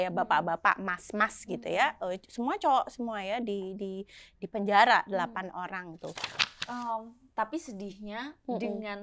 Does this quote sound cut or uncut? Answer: cut